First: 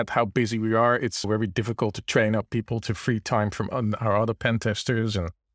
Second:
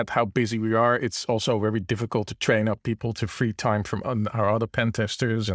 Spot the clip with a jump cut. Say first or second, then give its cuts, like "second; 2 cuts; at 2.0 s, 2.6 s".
first; 1 cut; at 1.2 s